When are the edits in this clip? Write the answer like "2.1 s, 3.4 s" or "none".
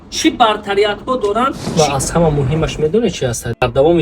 1.7 s